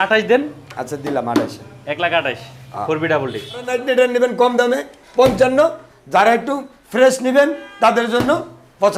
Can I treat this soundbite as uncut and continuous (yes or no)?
no